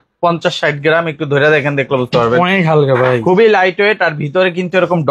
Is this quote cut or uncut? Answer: uncut